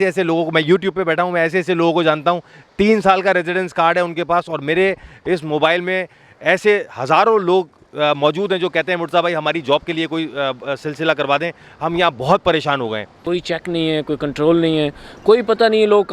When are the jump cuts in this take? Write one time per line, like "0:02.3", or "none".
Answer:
0:13.2